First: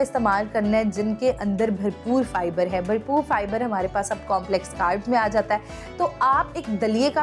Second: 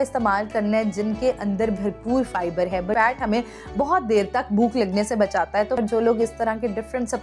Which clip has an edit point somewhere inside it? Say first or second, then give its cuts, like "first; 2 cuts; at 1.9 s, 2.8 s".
second; 2 cuts; at 2.9 s, 5.8 s